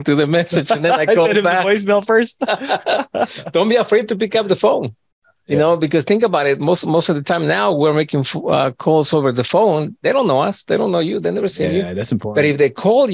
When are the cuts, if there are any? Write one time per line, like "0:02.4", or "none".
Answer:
none